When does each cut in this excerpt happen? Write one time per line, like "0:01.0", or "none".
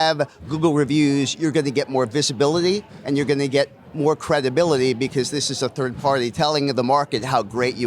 0:02.9
0:06.3